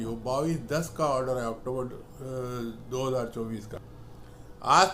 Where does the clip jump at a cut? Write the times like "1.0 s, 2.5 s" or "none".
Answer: 3.8 s